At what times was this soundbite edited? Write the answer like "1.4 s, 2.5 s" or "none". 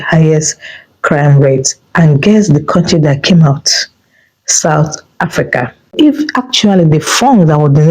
5.9 s

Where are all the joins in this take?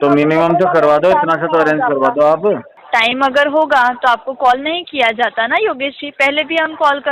2.7 s

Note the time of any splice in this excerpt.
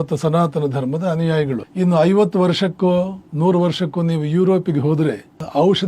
1.7 s, 3.2 s

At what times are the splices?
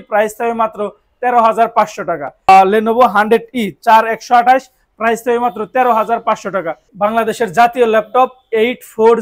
2.5 s, 6.9 s

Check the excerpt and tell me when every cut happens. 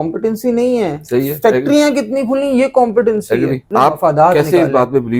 3.7 s

